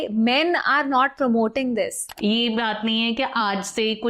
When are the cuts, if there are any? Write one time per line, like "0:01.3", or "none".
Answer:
0:02.0